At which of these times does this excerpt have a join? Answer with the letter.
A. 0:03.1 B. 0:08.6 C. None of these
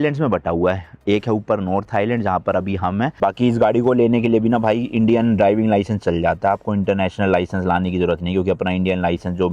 A